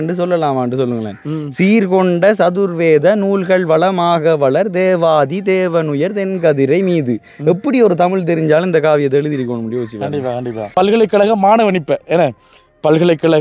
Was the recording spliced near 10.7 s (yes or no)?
yes